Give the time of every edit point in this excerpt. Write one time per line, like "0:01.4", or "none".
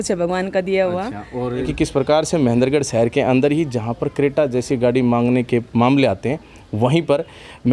0:01.7